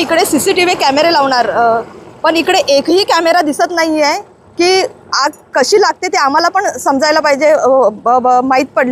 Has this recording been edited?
no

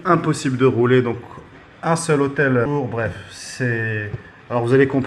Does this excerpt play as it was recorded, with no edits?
no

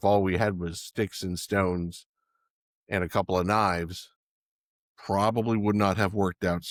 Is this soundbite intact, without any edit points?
yes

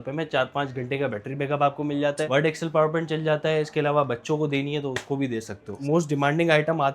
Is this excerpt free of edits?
no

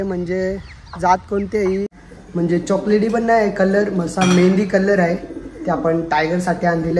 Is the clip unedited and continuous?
no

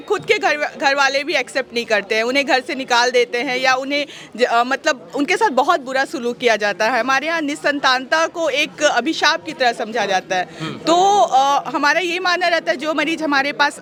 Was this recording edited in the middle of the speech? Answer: no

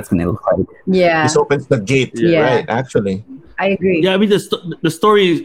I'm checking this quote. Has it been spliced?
yes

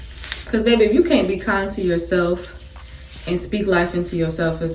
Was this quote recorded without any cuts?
yes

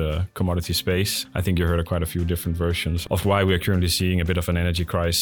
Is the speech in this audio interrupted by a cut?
no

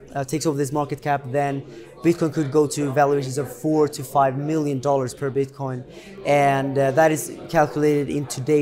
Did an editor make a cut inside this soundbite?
no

